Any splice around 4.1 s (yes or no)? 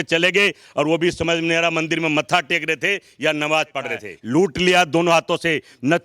yes